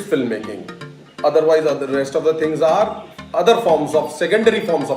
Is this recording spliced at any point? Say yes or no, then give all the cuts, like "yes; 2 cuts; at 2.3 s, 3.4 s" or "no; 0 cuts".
no; 0 cuts